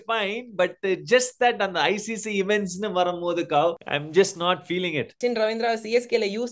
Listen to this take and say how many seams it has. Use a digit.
2